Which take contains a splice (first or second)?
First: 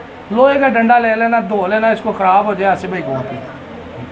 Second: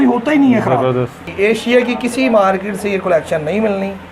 second